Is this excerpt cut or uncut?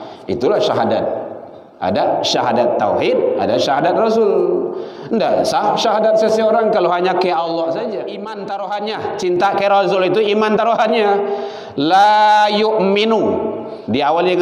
cut